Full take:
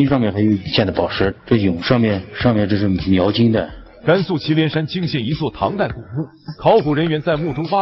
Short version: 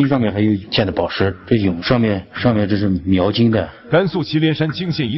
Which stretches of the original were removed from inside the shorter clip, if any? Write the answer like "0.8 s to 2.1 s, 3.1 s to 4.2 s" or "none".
3.8 s to 3.9 s